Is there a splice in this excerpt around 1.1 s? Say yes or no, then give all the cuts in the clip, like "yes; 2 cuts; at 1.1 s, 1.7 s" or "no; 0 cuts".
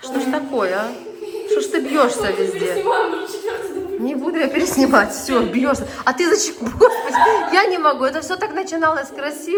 no; 0 cuts